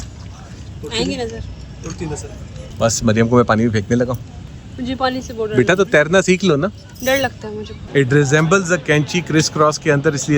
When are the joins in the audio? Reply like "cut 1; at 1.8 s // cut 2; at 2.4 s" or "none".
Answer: cut 1; at 2.6 s // cut 2; at 4.3 s // cut 3; at 7.7 s